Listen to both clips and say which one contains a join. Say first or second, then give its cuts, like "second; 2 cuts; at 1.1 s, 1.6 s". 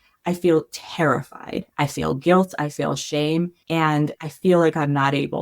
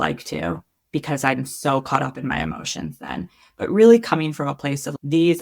first; 2 cuts; at 1.6 s, 3.6 s